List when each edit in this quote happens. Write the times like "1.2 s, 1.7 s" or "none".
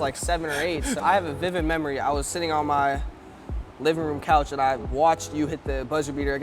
1.0 s

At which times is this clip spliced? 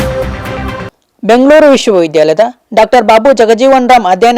0.9 s

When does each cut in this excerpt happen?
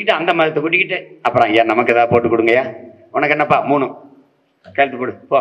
none

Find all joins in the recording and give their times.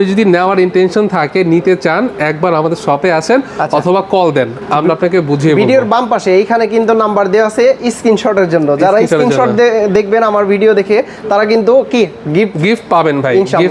none

